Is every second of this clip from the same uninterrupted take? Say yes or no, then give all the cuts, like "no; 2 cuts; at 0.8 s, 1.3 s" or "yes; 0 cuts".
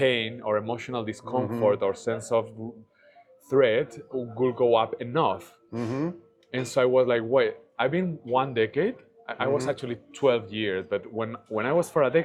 yes; 0 cuts